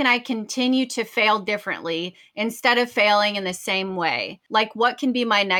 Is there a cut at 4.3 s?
yes; 1 cut; at 4.3 s

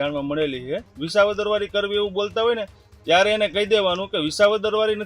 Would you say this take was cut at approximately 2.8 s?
no; 1 cut; at 0.9 s

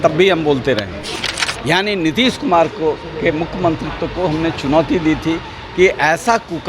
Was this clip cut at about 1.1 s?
yes; 1 cut; at 1.1 s

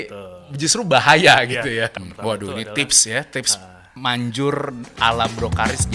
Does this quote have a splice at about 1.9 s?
yes; 1 cut; at 1.9 s

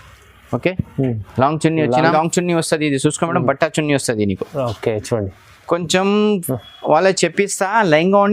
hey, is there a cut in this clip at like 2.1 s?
yes; 1 cut; at 2.1 s

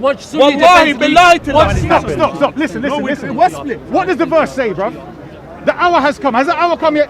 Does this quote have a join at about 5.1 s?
no; 1 cut; at 1.8 s

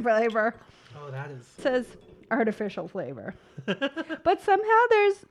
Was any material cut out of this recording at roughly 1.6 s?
yes; 1 cut; at 1.6 s

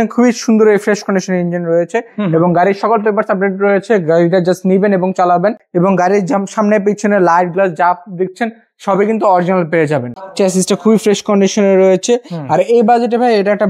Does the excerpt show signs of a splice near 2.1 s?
no; 2 cuts; at 5.6 s, 10.2 s

